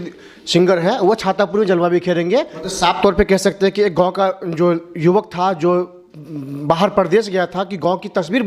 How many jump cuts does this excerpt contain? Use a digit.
1